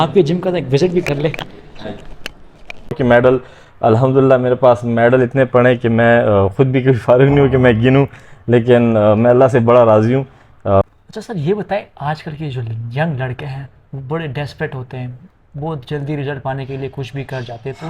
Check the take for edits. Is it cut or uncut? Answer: cut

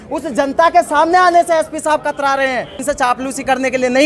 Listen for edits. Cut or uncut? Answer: cut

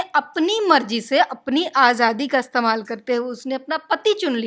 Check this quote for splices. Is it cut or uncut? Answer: uncut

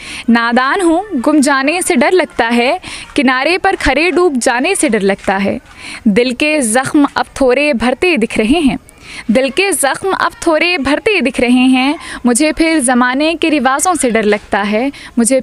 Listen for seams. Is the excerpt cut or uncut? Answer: uncut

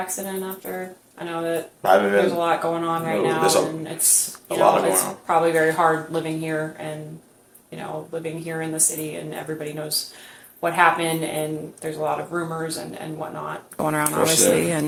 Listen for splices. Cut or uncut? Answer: uncut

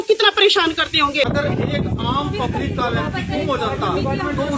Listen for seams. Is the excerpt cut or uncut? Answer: cut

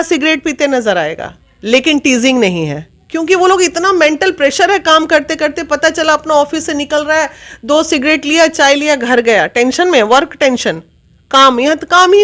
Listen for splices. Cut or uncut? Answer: uncut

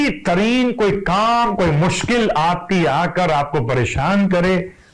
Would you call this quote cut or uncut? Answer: uncut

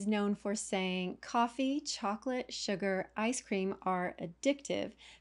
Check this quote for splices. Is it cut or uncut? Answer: uncut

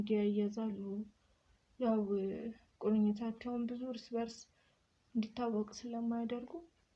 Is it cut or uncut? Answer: uncut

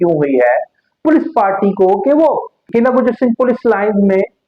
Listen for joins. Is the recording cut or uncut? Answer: cut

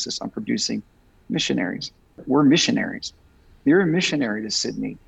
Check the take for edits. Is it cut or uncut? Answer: cut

